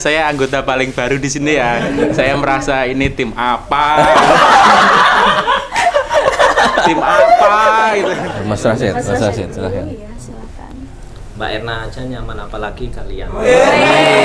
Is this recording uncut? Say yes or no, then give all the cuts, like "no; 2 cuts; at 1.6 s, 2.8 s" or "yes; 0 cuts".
no; 1 cut; at 8.1 s